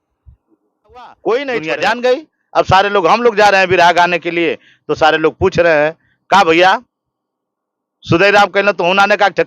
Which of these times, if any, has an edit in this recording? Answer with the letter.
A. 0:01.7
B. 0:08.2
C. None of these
A